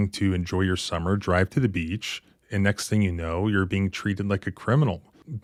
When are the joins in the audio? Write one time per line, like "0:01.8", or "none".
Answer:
none